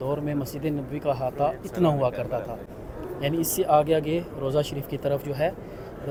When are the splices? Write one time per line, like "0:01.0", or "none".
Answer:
none